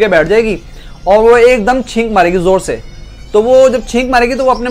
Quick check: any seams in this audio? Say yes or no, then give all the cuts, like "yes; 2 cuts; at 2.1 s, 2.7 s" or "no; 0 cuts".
no; 0 cuts